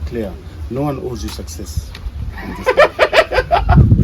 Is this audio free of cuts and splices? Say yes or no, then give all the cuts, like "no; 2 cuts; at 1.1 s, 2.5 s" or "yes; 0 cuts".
yes; 0 cuts